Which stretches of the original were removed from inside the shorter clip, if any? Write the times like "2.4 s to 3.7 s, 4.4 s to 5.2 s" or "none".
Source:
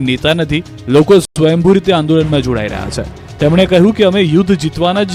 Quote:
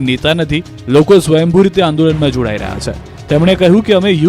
1.3 s to 1.4 s